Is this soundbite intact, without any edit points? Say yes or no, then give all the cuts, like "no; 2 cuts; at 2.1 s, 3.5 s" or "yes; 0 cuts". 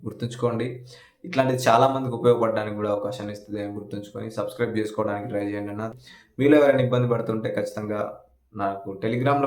no; 1 cut; at 5.9 s